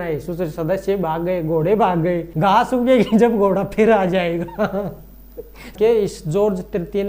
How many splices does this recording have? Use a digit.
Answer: 2